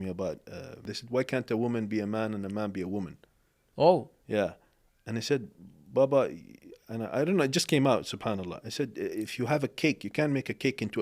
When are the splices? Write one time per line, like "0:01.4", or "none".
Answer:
0:00.9